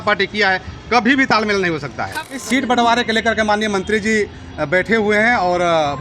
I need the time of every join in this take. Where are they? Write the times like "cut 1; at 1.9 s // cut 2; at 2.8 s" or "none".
cut 1; at 2.2 s